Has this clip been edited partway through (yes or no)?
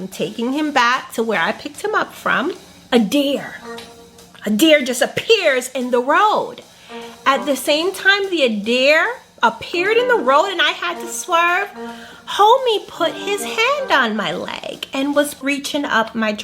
yes